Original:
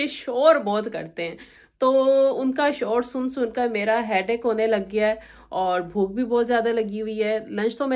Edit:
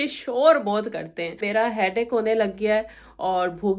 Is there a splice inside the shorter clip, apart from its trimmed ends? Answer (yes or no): yes